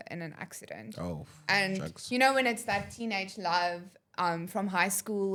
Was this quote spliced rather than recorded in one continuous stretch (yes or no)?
no